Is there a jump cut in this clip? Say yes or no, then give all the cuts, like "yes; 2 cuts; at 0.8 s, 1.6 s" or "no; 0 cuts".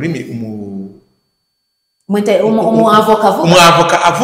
no; 0 cuts